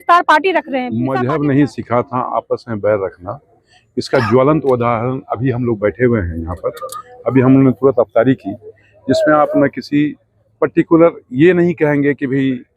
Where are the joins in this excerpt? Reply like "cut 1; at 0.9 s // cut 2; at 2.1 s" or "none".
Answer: cut 1; at 1.0 s